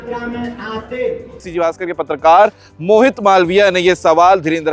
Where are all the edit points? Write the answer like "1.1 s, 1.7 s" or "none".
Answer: 1.5 s